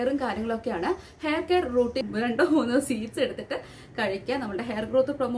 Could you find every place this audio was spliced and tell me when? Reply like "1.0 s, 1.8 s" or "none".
2.0 s